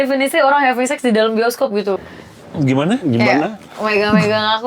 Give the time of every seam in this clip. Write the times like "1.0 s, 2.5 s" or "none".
1.9 s